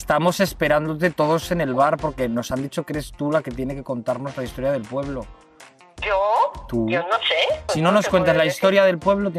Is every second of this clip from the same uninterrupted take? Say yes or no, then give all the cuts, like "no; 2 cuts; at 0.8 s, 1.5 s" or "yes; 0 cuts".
no; 1 cut; at 7.6 s